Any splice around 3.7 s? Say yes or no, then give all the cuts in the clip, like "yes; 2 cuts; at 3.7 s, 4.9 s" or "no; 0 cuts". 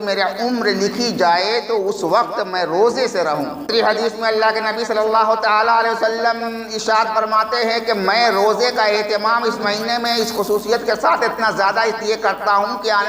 yes; 1 cut; at 3.7 s